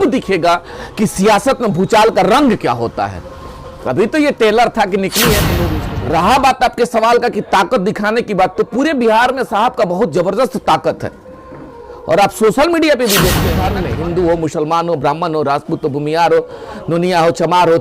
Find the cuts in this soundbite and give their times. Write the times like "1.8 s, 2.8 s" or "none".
5.6 s, 13.7 s